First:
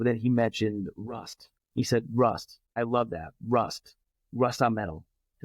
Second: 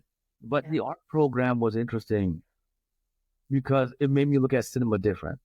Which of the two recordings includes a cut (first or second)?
first